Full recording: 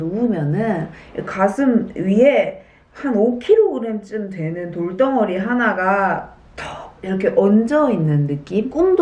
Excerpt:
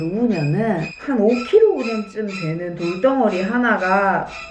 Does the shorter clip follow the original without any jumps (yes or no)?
no